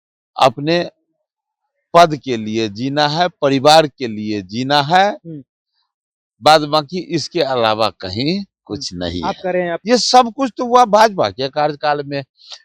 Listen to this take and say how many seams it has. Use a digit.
1